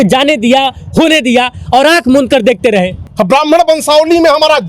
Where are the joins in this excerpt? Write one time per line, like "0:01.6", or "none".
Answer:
0:03.0